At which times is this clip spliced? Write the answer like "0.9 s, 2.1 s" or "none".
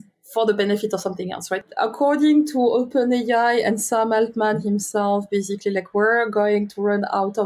1.7 s